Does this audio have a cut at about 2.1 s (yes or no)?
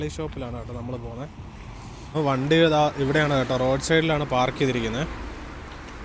yes